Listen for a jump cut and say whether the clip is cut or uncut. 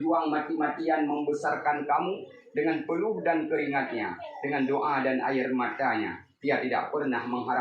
uncut